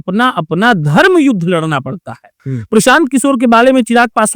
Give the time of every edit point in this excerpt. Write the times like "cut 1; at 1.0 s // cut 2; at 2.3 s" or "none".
cut 1; at 2.5 s